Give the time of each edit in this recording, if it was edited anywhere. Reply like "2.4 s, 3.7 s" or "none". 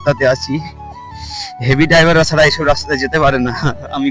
none

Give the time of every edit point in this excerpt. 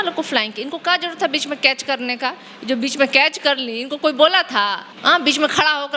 4.9 s

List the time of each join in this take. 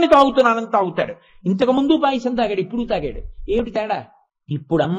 3.8 s

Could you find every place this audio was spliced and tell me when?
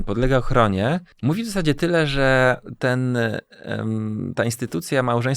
1.1 s

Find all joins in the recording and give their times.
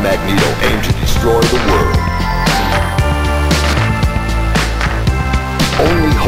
none

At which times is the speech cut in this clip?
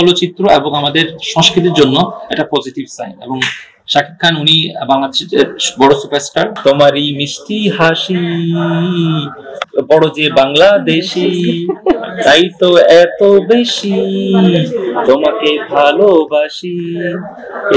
6.5 s

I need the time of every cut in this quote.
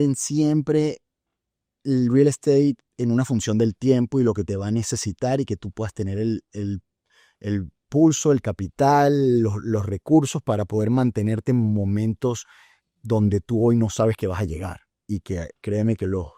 none

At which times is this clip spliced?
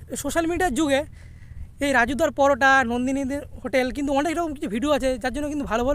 none

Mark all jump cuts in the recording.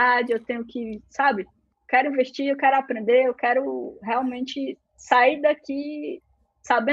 1.7 s

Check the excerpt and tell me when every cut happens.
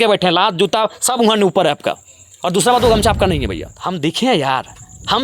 3.7 s

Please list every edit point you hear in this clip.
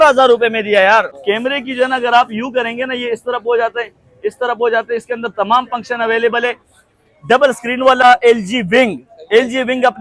1.2 s, 8.0 s

